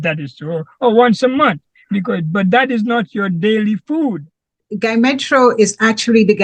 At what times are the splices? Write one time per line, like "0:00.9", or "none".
0:04.7